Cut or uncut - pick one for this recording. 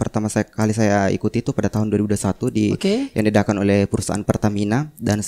cut